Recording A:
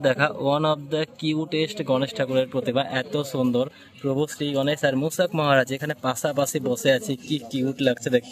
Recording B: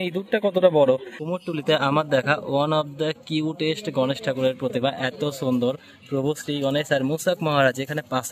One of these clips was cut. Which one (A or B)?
B